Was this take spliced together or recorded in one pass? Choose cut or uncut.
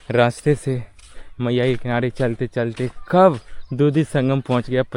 uncut